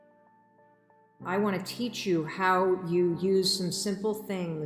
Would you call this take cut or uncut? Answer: cut